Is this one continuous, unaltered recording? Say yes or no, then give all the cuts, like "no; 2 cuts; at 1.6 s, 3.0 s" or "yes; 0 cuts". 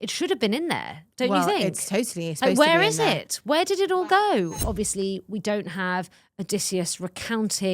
no; 1 cut; at 4.6 s